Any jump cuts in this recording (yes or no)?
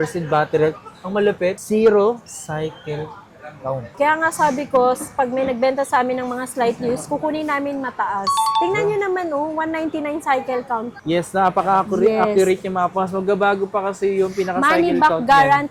yes